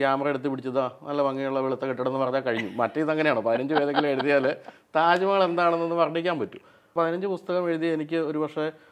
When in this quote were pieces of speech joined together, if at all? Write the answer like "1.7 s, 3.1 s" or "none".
6.9 s